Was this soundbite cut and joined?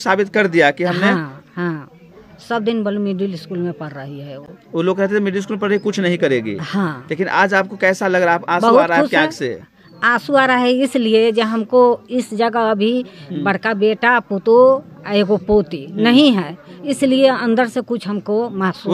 no; 0 cuts

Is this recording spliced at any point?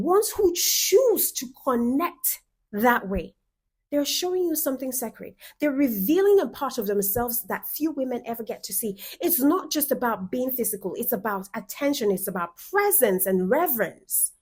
no; 0 cuts

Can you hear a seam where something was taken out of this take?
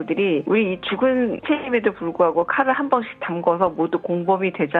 no; 0 cuts

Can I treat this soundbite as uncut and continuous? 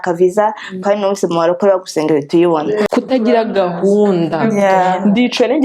no; 1 cut; at 2.9 s

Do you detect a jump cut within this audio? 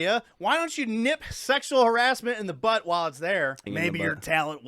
yes; 1 cut; at 3.6 s

